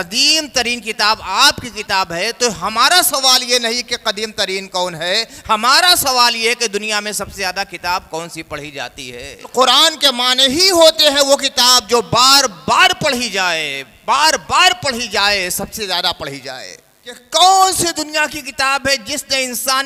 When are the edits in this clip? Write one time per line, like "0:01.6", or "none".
0:09.5
0:17.2